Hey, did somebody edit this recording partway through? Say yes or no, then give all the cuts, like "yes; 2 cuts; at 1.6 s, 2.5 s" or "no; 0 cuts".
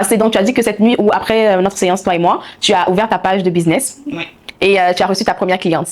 no; 0 cuts